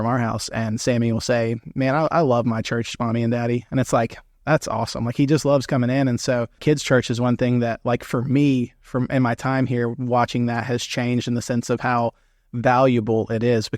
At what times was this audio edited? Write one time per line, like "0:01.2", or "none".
0:06.6

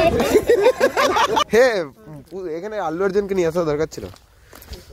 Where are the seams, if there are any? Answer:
0:01.4

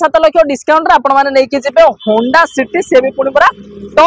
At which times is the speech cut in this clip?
none

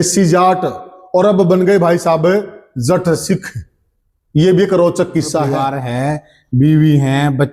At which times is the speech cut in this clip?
0:05.5

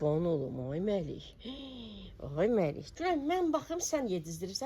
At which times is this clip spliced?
0:02.9

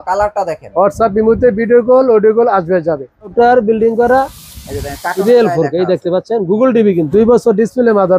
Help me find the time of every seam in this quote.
0:03.3
0:07.1

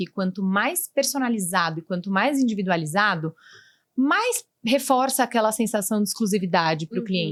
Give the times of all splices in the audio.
none

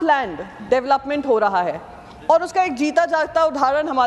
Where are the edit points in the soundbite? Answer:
none

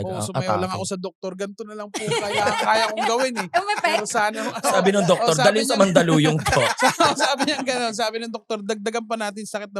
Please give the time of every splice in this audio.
none

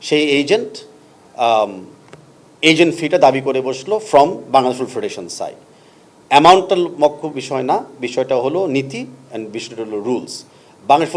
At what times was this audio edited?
none

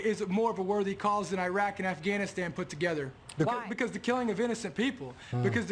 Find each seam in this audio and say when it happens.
0:03.6

